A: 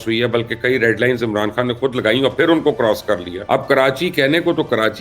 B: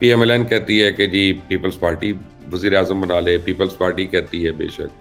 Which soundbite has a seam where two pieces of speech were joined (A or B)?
A